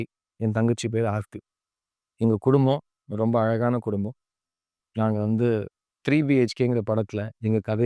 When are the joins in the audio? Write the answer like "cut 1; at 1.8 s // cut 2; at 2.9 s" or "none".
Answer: none